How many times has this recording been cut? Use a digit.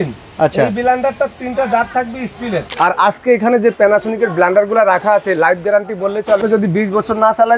2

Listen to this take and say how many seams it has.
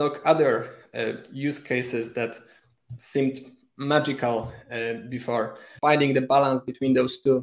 1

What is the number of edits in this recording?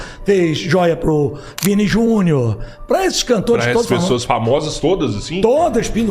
0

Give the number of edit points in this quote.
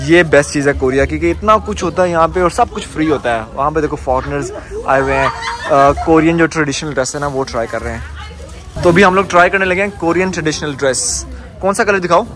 0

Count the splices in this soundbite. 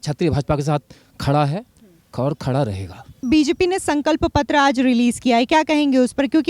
1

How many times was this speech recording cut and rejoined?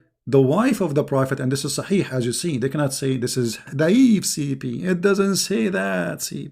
1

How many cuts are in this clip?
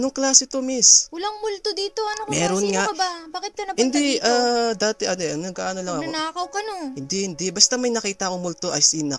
0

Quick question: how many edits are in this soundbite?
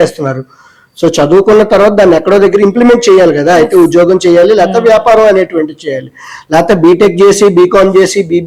0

